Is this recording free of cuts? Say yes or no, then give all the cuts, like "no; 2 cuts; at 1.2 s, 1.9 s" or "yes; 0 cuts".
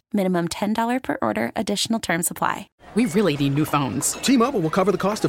no; 1 cut; at 2.6 s